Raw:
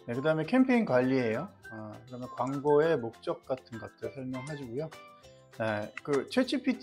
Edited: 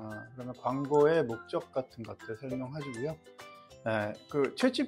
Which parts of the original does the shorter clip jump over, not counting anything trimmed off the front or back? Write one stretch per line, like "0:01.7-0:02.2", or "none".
none